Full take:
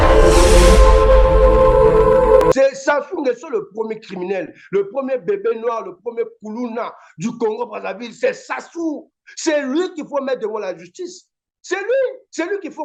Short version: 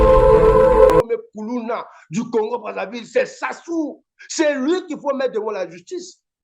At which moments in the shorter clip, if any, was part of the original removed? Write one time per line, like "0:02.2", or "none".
0:01.0